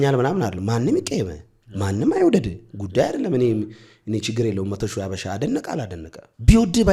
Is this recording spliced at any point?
no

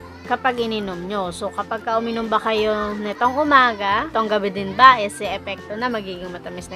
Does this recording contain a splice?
yes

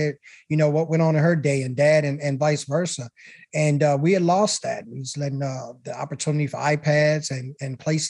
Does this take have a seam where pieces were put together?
no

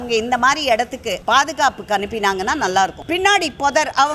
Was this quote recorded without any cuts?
no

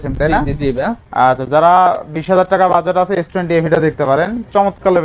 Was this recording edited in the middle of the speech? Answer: no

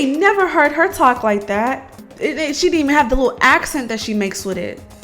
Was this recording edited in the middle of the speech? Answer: yes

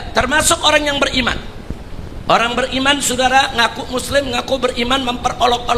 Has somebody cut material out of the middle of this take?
no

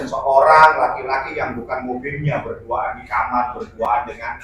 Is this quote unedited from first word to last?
yes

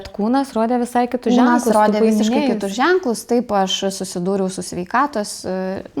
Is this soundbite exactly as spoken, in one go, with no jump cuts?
yes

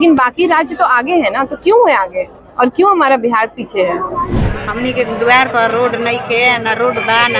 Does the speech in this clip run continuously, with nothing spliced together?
no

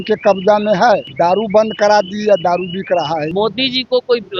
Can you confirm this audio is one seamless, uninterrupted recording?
no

